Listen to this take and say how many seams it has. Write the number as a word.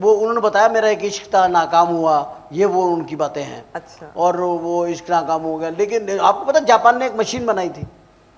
zero